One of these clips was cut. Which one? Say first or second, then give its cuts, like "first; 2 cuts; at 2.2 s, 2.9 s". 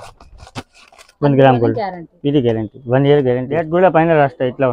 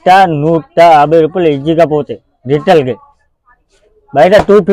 first; 1 cut; at 3.7 s